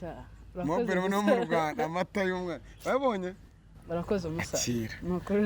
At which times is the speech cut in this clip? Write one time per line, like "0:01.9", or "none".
none

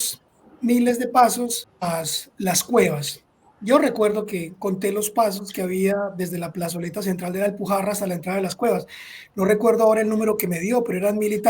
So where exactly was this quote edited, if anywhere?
0:01.6

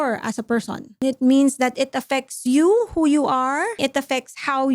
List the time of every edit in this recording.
0:01.0
0:03.8

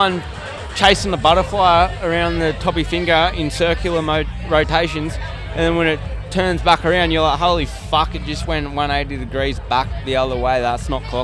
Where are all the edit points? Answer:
none

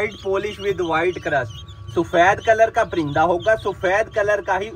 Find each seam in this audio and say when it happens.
none

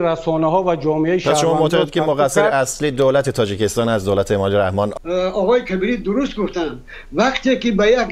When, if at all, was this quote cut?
0:04.9

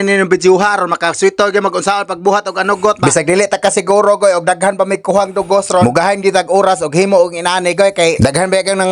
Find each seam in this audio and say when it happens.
none

